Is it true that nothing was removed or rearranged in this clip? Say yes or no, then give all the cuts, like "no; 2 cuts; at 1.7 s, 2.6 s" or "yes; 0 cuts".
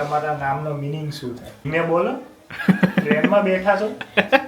no; 1 cut; at 1.6 s